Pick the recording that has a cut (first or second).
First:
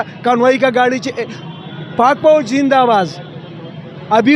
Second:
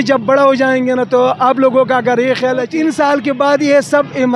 second